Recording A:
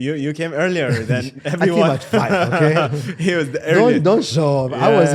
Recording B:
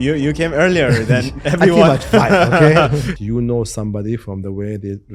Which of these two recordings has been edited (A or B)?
B